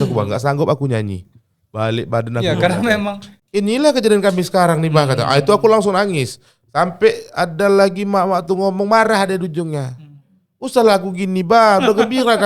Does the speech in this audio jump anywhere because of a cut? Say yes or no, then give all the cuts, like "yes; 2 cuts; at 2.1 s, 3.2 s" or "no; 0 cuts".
yes; 1 cut; at 3.3 s